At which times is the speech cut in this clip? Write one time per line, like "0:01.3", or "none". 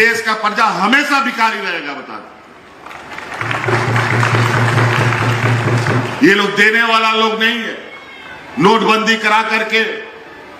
none